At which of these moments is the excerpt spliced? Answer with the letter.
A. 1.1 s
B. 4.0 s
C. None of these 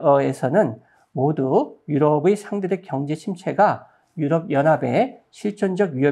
C